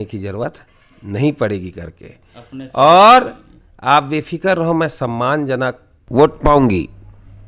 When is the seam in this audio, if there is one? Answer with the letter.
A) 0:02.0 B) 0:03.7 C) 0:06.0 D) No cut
D